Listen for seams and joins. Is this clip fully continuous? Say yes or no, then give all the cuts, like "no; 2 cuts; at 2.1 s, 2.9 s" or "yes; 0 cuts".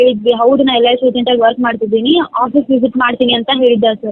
yes; 0 cuts